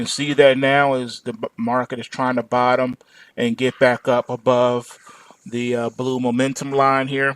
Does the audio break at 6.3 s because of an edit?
yes; 1 cut; at 6.3 s

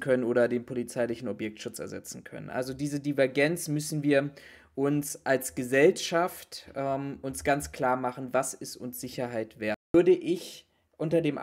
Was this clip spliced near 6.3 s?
no; 1 cut; at 9.9 s

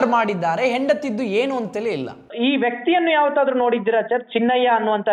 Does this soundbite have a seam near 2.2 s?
yes; 1 cut; at 2.2 s

